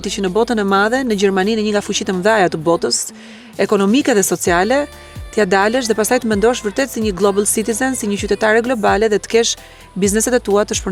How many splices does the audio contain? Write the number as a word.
zero